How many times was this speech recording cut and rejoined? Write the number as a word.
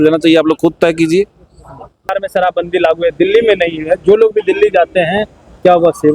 one